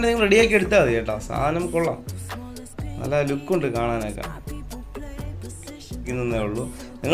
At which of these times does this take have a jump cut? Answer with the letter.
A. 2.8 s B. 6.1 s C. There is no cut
B